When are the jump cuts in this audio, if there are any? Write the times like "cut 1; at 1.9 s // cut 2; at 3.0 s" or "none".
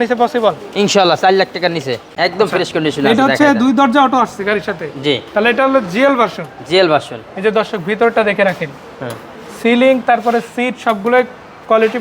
cut 1; at 2.1 s